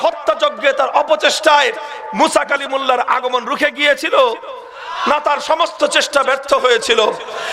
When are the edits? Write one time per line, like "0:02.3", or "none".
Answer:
none